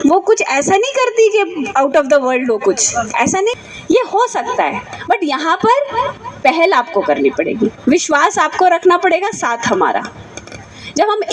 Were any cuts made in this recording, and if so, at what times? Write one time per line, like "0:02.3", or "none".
0:03.6